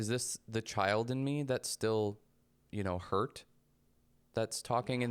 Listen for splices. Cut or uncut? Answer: uncut